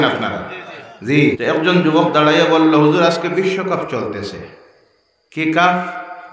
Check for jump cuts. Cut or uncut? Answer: cut